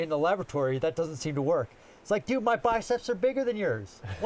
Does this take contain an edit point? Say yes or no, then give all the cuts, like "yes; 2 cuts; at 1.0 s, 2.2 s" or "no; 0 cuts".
no; 0 cuts